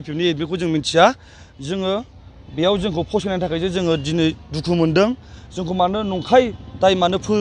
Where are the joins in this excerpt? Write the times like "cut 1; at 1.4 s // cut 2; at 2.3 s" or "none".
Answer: none